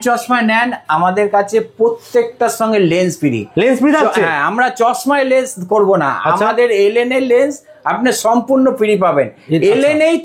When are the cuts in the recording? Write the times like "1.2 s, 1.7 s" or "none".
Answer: none